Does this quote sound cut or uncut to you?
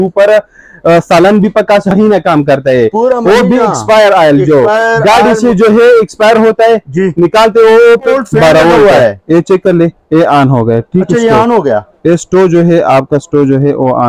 cut